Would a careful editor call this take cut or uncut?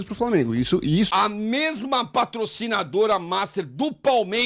cut